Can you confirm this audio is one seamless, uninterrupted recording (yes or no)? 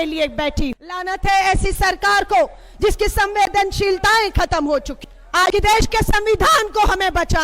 no